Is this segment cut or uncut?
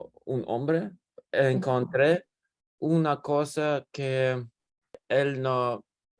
cut